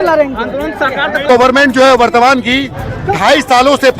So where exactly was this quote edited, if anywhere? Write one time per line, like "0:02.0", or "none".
0:01.2